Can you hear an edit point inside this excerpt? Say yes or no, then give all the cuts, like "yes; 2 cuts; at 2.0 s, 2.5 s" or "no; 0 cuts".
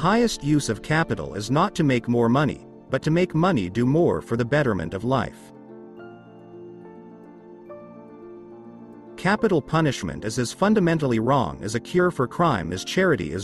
no; 0 cuts